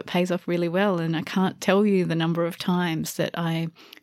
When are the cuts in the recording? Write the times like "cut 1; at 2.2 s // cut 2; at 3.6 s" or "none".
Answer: none